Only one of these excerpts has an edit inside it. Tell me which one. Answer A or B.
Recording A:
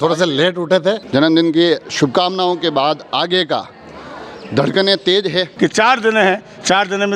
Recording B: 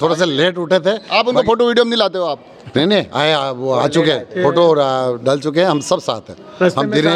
A